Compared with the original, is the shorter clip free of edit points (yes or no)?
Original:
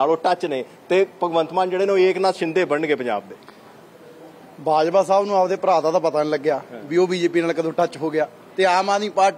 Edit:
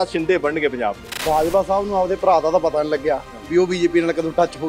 no